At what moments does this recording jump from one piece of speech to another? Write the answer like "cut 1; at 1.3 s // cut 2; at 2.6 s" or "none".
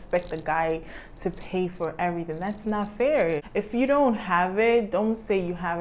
cut 1; at 3.5 s